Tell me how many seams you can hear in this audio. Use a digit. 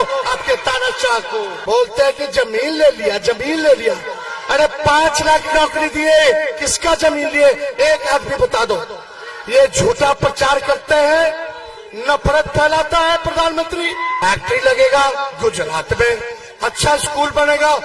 2